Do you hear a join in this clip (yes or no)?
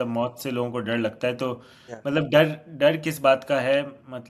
no